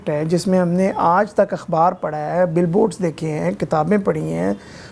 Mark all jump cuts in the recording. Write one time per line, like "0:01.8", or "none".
none